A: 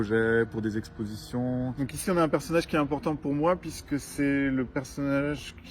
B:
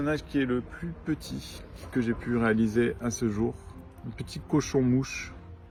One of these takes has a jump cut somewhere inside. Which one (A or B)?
A